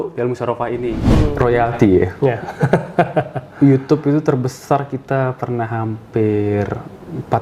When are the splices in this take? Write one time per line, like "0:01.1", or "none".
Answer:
0:01.1